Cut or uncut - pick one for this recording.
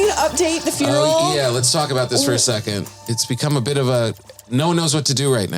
cut